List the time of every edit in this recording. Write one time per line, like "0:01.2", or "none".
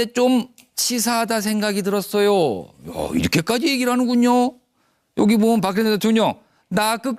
0:06.2